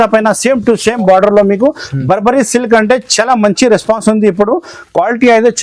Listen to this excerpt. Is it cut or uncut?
uncut